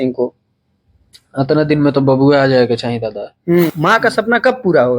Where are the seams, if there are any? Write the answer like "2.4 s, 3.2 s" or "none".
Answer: 3.7 s